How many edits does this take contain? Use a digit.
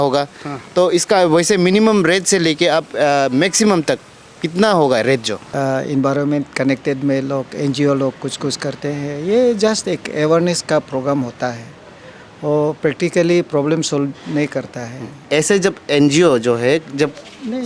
2